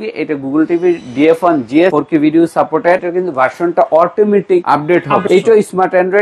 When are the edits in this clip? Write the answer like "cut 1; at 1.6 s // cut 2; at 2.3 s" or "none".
cut 1; at 1.9 s // cut 2; at 3.1 s // cut 3; at 5.0 s

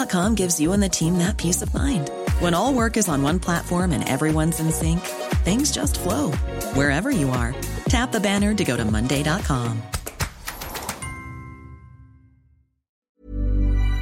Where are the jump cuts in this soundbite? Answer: cut 1; at 13.1 s

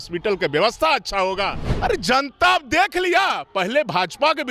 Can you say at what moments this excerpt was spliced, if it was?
cut 1; at 1.6 s

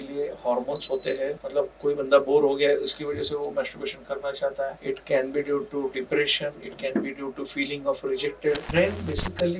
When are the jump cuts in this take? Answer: cut 1; at 1.4 s // cut 2; at 4.8 s // cut 3; at 8.6 s

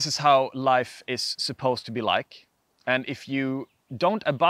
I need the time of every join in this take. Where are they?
none

